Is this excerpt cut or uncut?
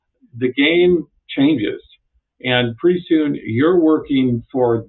uncut